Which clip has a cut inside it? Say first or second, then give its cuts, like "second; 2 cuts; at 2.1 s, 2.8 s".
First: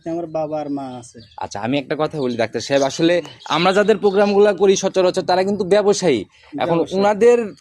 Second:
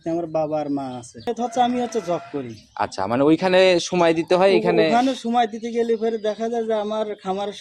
second; 1 cut; at 1.3 s